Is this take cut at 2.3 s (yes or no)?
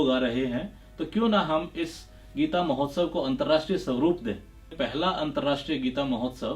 no